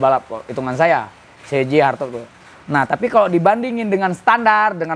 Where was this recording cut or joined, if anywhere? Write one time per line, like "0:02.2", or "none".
none